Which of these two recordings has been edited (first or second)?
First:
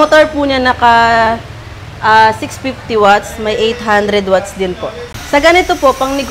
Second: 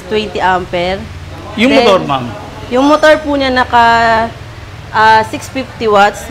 first